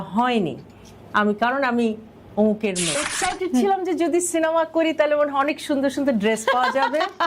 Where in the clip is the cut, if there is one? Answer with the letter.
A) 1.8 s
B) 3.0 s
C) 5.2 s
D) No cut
B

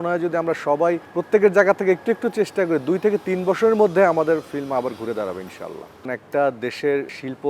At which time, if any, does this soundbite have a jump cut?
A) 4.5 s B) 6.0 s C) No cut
B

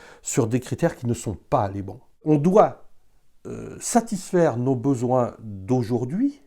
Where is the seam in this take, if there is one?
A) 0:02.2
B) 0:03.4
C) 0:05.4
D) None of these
A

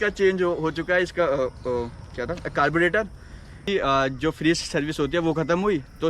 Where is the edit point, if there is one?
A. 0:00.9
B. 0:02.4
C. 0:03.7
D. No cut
C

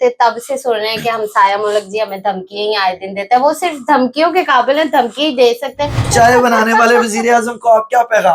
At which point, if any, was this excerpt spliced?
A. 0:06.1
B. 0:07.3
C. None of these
A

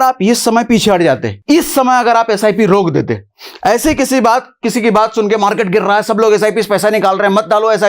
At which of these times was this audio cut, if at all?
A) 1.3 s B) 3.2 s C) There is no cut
A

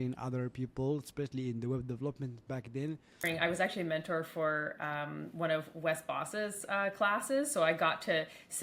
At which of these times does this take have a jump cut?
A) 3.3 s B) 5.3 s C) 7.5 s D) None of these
A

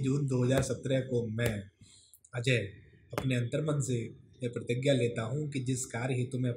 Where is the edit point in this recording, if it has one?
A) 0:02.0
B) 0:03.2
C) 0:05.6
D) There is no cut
D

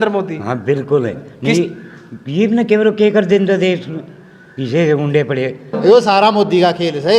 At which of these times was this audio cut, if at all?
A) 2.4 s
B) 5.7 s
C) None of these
B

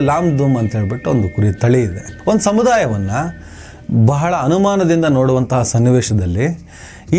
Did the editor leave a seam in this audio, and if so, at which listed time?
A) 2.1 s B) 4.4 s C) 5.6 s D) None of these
A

